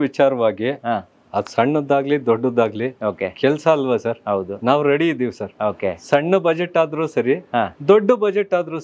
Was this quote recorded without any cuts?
yes; 0 cuts

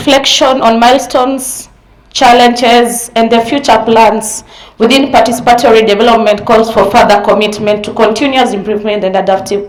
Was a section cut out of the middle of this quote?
no; 0 cuts

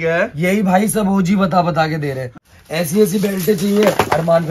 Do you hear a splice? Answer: yes; 1 cut; at 2.2 s

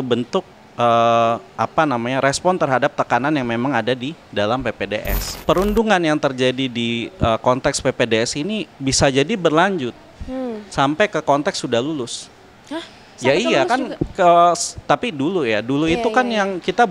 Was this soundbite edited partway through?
yes; 1 cut; at 5.3 s

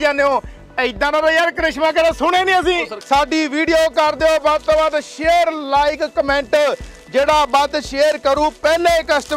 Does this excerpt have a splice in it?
yes; 1 cut; at 2.9 s

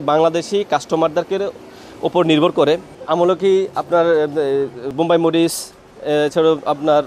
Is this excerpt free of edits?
yes; 0 cuts

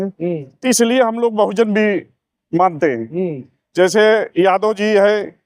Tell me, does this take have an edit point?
no; 0 cuts

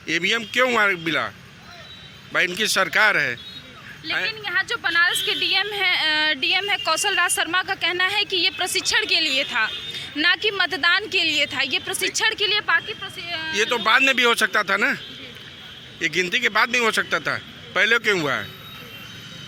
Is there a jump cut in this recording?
no; 0 cuts

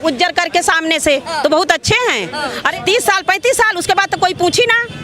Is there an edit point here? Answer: yes; 1 cut; at 2.7 s

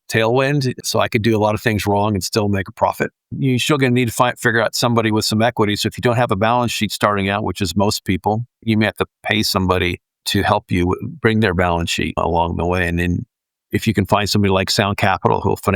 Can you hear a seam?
yes; 2 cuts; at 8.6 s, 12.2 s

